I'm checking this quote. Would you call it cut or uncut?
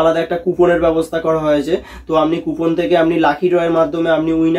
uncut